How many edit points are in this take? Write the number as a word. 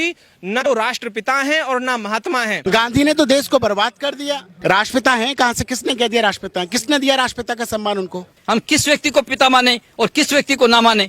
three